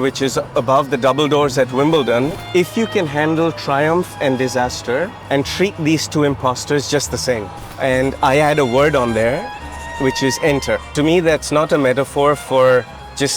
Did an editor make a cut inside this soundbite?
yes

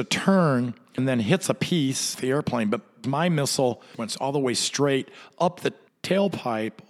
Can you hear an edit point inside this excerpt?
yes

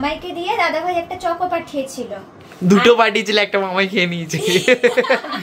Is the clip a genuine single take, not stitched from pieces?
yes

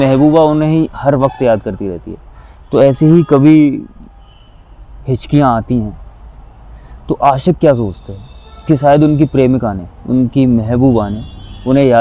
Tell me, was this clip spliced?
no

